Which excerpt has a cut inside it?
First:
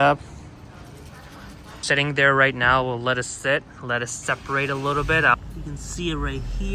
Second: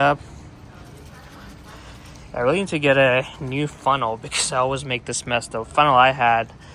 first; 2 cuts; at 1.7 s, 5.3 s

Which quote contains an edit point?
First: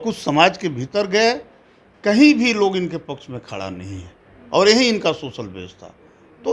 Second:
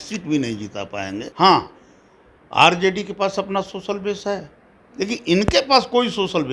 second; 1 cut; at 1.3 s

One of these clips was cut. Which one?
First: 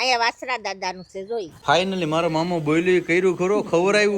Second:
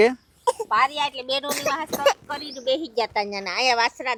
first; 1 cut; at 1.5 s

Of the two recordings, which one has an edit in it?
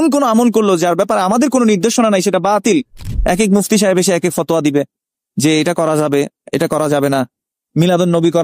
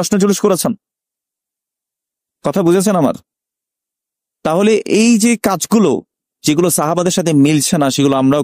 first; 1 cut; at 3.0 s

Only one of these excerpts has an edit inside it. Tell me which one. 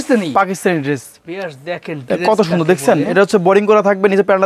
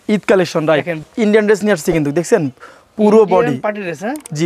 second; 1 cut; at 1.0 s

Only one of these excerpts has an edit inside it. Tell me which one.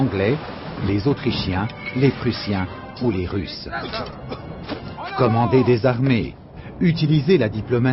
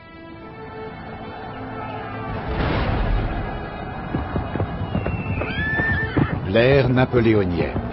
first; 1 cut; at 3.9 s

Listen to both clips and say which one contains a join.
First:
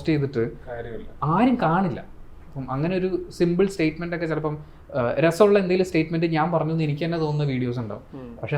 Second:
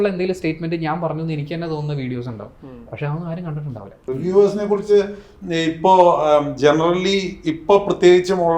second; 1 cut; at 4.0 s

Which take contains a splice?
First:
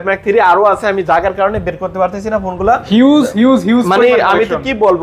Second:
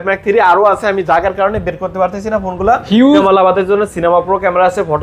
second; 1 cut; at 3.2 s

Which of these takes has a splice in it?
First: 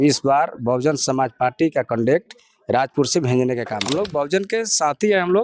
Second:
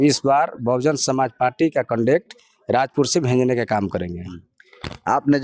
first; 1 cut; at 3.8 s

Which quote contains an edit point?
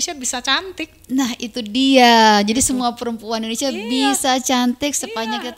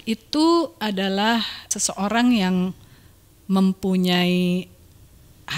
second; 1 cut; at 1.7 s

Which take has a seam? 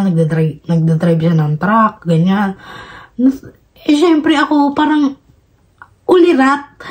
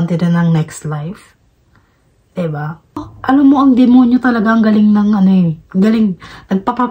second; 1 cut; at 3.1 s

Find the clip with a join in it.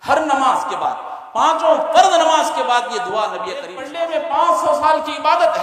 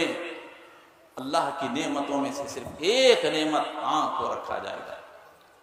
first; 1 cut; at 3.8 s

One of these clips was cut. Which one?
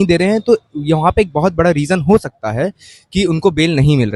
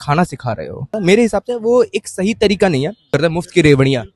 second; 2 cuts; at 0.9 s, 3.1 s

